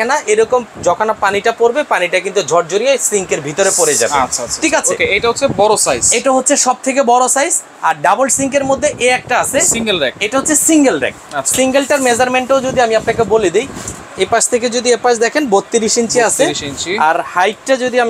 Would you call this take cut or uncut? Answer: uncut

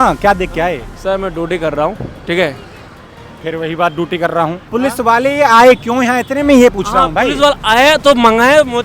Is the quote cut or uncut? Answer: cut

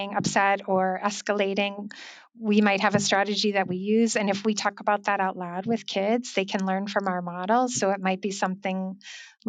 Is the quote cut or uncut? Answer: uncut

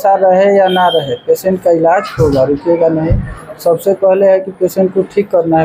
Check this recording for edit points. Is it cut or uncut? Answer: uncut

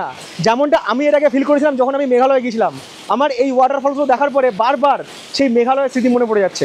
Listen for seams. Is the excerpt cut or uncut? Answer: uncut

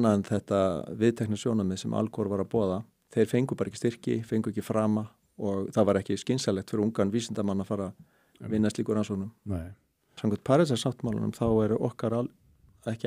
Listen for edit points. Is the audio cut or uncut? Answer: cut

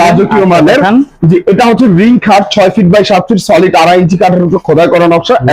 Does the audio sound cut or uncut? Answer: uncut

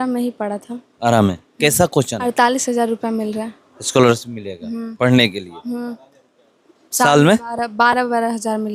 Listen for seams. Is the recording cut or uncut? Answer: cut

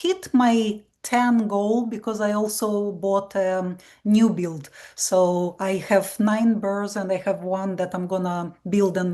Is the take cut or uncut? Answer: uncut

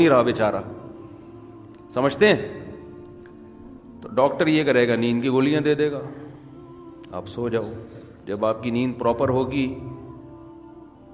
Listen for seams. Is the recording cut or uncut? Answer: uncut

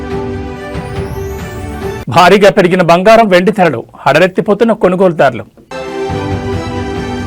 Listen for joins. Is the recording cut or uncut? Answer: uncut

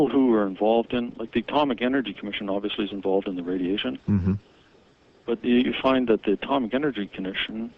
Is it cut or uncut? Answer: cut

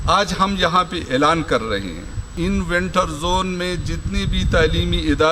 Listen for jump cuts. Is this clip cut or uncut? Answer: cut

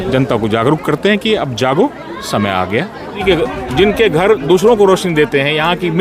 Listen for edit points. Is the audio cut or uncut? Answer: cut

